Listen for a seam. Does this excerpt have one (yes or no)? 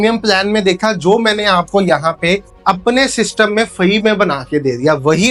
no